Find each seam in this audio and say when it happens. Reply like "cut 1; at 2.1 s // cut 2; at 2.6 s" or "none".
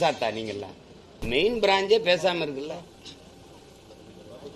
cut 1; at 1.2 s